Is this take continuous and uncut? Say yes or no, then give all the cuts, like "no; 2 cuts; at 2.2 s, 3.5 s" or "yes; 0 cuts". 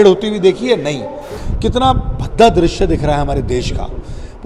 no; 1 cut; at 1.4 s